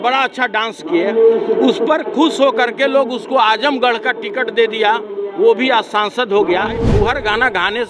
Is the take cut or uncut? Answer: cut